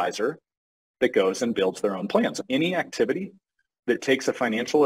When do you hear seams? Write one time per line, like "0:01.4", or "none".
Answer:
0:02.4